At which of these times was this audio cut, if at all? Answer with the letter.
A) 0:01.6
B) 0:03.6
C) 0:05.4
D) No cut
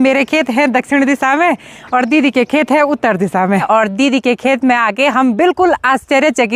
B